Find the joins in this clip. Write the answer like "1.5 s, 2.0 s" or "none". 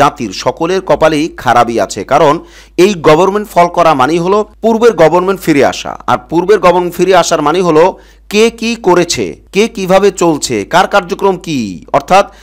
none